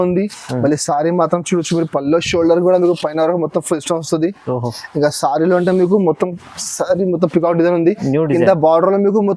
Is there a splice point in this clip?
no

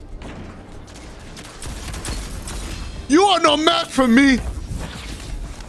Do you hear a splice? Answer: no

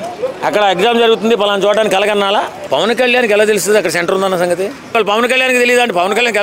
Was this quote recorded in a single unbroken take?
no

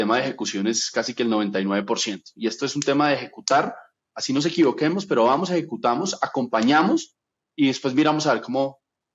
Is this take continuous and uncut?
yes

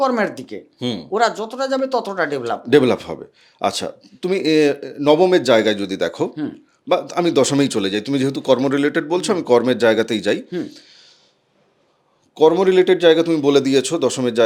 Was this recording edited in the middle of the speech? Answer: no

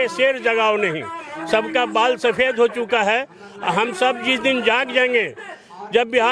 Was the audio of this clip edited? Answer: no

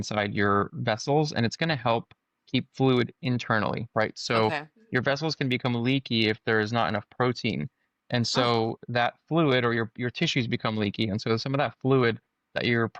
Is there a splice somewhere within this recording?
no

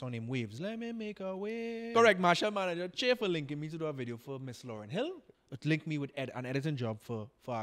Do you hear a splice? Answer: yes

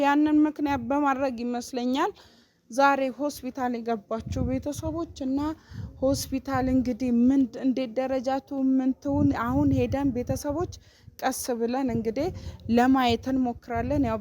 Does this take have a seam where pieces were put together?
no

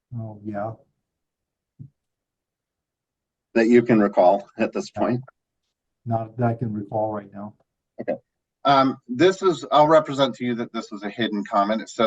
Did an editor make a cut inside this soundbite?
yes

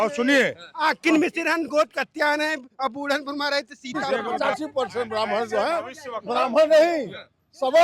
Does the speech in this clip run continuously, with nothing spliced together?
no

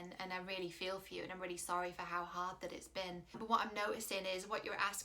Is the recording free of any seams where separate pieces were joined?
no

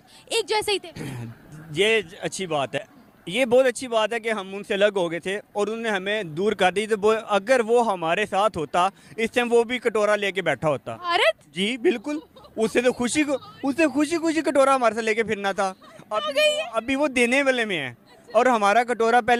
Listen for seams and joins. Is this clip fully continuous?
yes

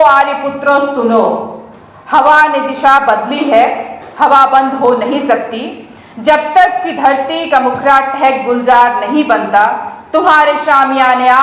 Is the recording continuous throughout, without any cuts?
yes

